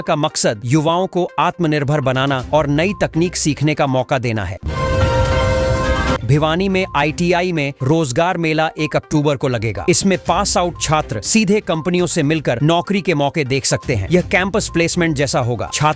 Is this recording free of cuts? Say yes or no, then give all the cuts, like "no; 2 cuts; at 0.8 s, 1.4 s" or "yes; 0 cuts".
no; 2 cuts; at 4.6 s, 6.2 s